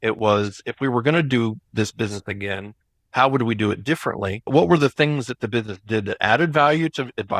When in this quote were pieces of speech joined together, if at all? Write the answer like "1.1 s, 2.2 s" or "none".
4.5 s